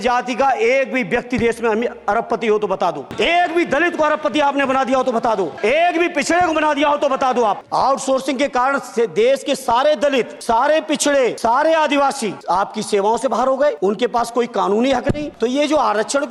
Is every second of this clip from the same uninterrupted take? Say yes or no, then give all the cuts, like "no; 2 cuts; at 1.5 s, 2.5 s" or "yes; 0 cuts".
no; 8 cuts; at 3.1 s, 5.5 s, 7.6 s, 10.4 s, 11.4 s, 12.4 s, 13.8 s, 15.3 s